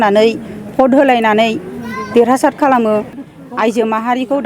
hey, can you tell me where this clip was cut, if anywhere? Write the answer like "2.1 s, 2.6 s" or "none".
3.2 s